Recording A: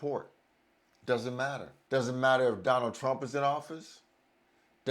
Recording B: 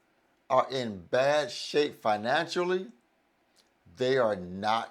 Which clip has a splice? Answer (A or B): A